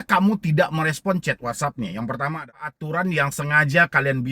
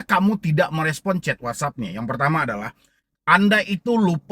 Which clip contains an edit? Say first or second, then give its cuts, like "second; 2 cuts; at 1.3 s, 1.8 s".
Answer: first; 1 cut; at 2.8 s